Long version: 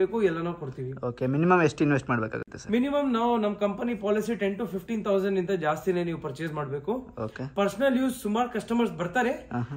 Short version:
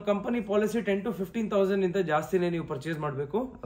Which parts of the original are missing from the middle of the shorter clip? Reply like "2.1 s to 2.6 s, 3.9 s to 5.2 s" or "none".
none